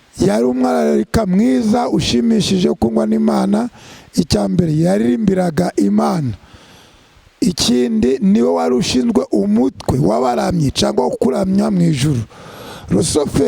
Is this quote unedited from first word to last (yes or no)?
yes